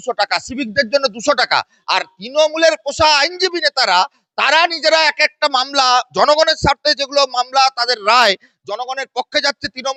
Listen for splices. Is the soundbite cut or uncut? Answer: uncut